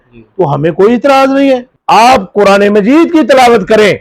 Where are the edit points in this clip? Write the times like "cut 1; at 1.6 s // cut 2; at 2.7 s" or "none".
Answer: cut 1; at 1.8 s